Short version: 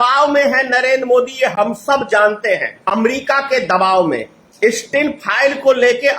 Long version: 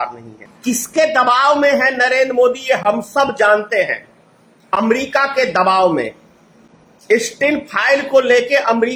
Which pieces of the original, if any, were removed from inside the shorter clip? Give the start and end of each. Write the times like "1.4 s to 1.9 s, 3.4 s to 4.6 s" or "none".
4.0 s to 4.6 s, 6.2 s to 6.9 s

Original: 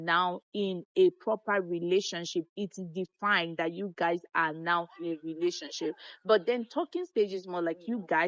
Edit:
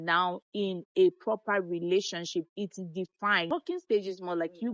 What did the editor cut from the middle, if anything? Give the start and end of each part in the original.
3.5 s to 6.7 s

